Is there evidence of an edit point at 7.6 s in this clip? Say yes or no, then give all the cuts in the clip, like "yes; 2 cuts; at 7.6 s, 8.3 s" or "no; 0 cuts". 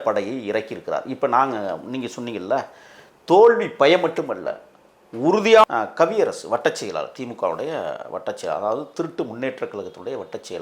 no; 1 cut; at 5.6 s